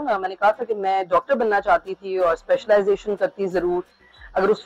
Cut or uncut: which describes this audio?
uncut